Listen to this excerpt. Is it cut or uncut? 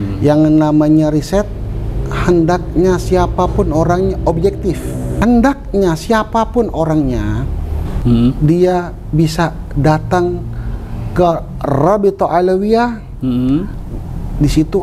cut